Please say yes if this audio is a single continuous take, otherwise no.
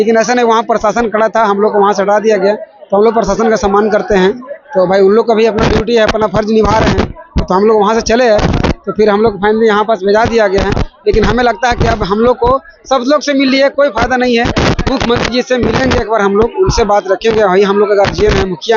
yes